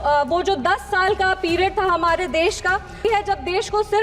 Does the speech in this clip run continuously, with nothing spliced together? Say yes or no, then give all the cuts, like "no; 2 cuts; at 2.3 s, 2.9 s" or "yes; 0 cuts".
no; 1 cut; at 3.0 s